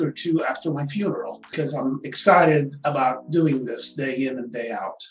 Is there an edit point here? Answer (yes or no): yes